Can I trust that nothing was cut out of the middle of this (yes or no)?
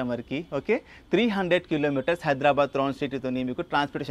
yes